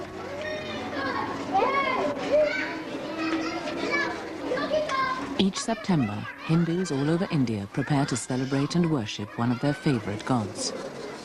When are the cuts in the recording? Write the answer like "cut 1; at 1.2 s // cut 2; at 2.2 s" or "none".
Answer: cut 1; at 1.5 s

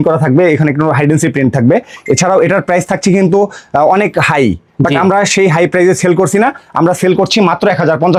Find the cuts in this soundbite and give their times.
none

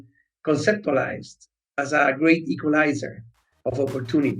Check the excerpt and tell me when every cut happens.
none

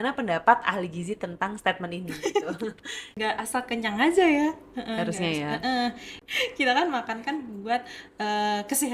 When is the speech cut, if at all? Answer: cut 1; at 3.2 s // cut 2; at 6.1 s

